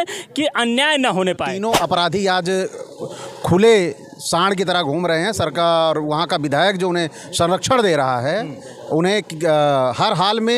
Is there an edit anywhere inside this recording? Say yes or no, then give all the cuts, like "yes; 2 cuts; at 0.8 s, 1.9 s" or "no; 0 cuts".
yes; 1 cut; at 1.6 s